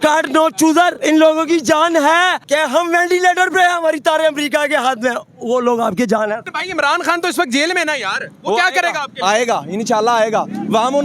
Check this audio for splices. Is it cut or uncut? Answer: cut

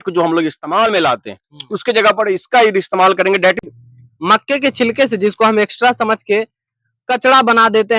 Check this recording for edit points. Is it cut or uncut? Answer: cut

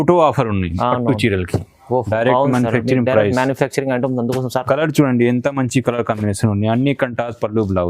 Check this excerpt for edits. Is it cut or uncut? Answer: cut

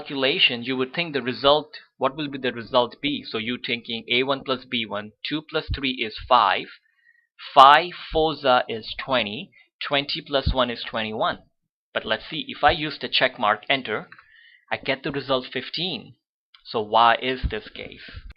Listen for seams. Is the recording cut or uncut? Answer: uncut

